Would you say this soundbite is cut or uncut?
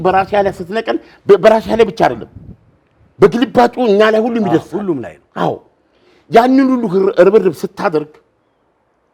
uncut